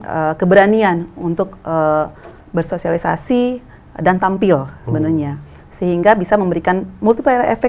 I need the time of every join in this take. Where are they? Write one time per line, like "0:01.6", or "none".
none